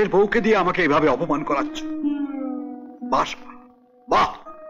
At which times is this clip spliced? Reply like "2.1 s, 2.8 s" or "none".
none